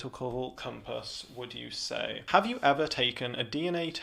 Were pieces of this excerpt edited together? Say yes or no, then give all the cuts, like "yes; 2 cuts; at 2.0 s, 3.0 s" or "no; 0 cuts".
yes; 1 cut; at 2.2 s